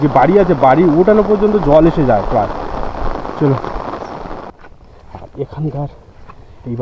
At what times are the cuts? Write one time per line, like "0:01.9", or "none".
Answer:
0:04.4

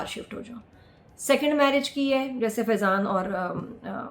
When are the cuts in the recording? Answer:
none

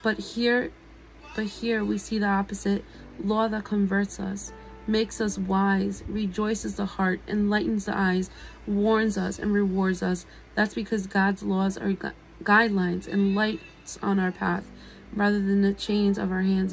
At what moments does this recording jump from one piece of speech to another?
none

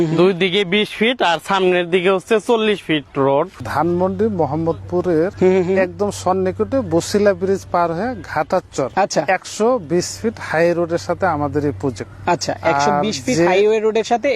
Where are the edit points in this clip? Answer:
0:03.6
0:05.3
0:08.9
0:12.1

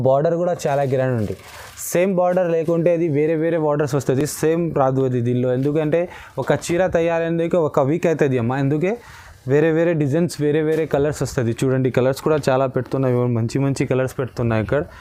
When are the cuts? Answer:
none

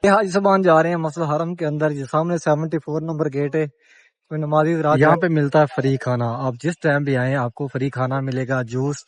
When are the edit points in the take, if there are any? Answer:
0:05.0

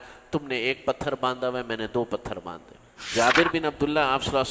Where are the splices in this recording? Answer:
0:03.1

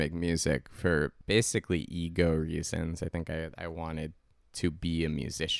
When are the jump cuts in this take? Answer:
0:01.2

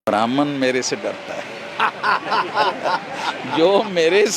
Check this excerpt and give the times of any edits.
none

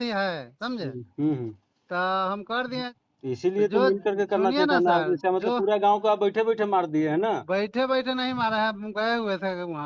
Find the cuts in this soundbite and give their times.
0:02.9

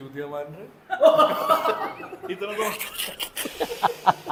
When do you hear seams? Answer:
none

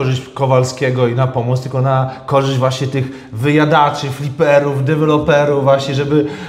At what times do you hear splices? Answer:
none

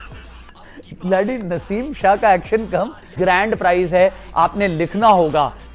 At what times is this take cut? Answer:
0:03.1

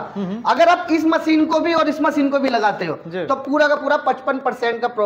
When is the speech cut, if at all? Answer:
none

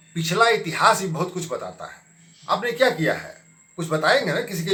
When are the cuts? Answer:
none

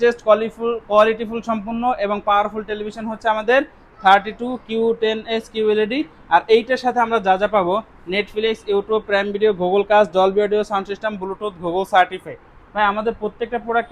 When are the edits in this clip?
none

